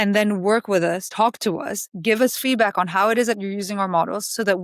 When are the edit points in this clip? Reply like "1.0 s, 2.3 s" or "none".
1.1 s